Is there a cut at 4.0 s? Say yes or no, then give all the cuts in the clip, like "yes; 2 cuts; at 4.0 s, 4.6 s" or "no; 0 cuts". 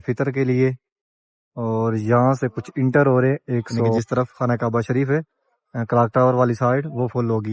yes; 1 cut; at 4.0 s